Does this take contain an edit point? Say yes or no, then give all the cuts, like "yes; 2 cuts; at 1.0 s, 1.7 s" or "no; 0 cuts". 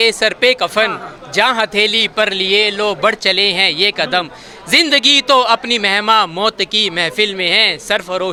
no; 0 cuts